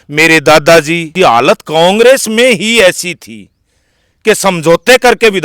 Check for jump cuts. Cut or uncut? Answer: cut